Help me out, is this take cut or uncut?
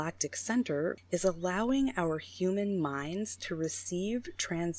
cut